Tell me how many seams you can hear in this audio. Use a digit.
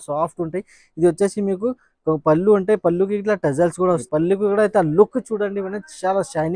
1